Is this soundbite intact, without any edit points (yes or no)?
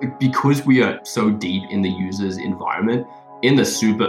yes